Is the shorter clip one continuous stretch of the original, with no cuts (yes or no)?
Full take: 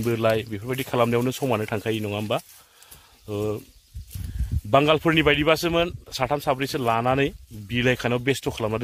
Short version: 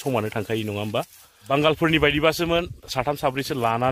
no